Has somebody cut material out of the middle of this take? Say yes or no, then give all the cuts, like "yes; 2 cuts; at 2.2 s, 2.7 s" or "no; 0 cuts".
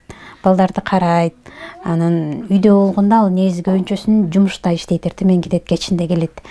no; 0 cuts